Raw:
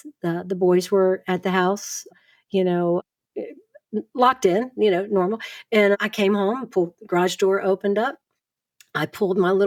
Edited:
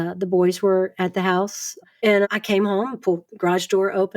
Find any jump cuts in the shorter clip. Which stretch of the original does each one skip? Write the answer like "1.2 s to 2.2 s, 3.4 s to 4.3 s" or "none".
2.1 s to 5.5 s